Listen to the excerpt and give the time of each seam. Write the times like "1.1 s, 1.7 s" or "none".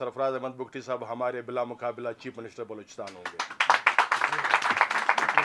none